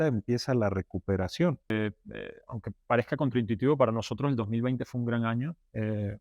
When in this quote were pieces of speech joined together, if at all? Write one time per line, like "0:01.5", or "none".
0:01.7